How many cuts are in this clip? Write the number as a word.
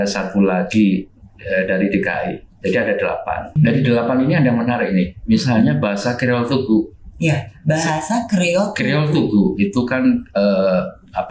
one